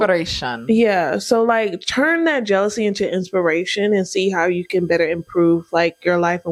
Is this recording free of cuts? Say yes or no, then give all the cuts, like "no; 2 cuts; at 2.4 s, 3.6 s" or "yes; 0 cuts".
yes; 0 cuts